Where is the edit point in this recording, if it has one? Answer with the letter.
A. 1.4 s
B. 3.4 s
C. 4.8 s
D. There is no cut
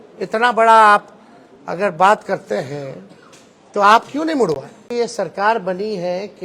C